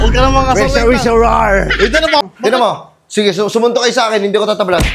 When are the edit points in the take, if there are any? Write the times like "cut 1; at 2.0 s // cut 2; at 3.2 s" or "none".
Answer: cut 1; at 2.3 s